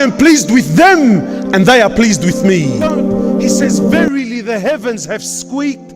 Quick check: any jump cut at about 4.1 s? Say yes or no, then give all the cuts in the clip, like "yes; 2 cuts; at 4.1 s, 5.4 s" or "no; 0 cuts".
yes; 1 cut; at 4.1 s